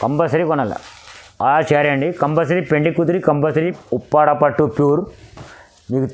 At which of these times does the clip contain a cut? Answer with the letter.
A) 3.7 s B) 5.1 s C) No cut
A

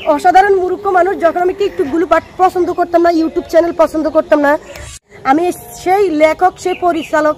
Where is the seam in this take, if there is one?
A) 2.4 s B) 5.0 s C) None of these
B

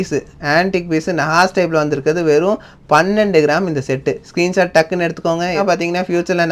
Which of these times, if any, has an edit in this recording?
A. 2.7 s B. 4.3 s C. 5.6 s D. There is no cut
C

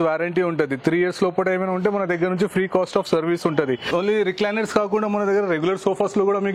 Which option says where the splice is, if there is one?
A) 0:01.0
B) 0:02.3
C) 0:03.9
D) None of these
C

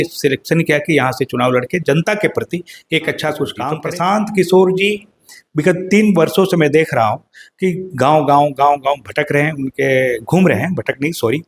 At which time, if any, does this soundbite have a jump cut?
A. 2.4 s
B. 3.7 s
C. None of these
B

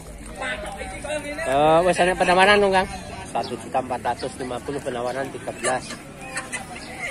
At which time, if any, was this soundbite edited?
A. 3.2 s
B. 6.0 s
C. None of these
A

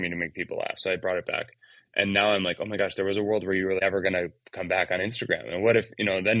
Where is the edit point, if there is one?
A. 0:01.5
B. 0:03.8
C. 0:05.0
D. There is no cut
B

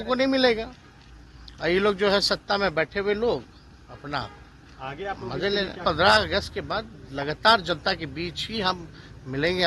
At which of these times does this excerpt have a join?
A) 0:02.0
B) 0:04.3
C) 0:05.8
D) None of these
C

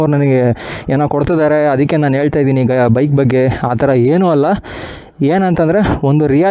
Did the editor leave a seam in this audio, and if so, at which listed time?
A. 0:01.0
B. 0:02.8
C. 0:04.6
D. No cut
D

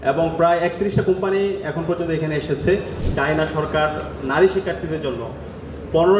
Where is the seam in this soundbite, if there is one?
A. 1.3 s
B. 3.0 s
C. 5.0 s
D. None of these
B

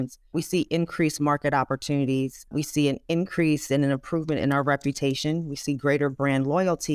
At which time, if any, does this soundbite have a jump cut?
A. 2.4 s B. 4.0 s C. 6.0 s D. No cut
A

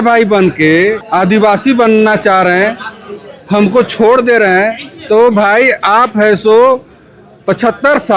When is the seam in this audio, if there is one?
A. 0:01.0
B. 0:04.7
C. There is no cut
A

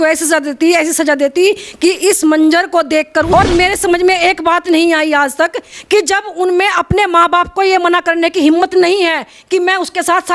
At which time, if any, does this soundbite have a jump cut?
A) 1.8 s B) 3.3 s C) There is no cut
B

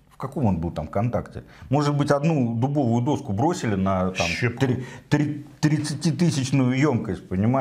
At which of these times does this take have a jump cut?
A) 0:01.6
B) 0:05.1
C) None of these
C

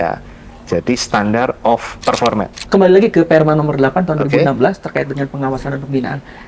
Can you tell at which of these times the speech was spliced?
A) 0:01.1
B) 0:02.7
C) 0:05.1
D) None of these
B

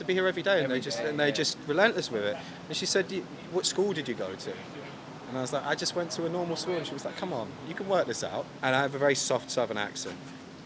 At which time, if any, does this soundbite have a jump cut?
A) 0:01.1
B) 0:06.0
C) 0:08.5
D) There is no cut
C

